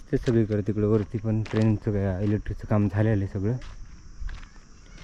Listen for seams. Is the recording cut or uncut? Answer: uncut